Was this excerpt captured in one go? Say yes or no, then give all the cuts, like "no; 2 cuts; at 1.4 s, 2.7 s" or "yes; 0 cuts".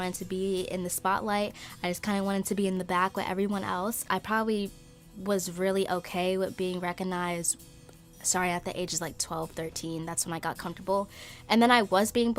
yes; 0 cuts